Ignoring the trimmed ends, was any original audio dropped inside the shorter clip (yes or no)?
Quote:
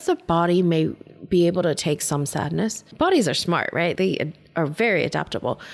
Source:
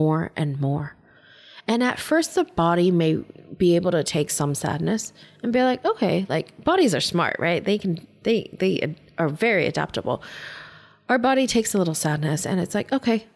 yes